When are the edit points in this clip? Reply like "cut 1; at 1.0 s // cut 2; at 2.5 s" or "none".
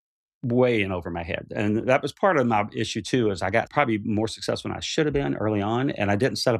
cut 1; at 3.7 s